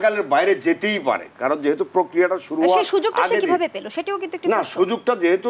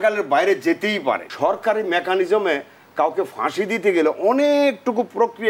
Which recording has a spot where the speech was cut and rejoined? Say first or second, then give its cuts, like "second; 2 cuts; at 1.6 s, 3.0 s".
second; 1 cut; at 1.3 s